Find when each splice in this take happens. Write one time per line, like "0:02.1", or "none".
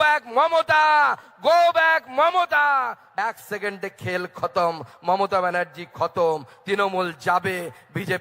0:03.2